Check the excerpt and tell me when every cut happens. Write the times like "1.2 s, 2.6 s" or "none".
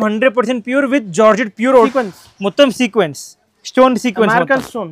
1.9 s